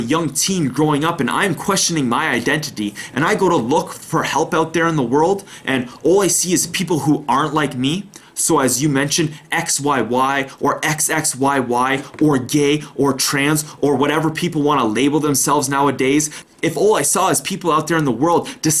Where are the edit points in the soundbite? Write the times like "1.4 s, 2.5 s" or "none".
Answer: 16.4 s